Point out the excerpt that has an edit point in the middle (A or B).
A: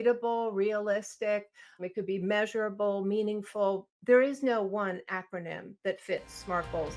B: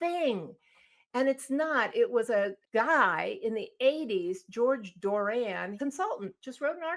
B